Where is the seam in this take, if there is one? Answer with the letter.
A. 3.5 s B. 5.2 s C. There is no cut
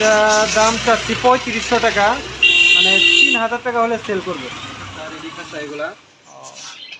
B